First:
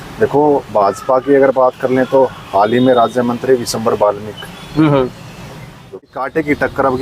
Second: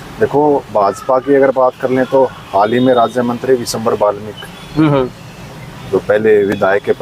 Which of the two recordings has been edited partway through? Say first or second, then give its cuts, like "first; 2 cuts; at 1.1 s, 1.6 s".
first; 1 cut; at 6.1 s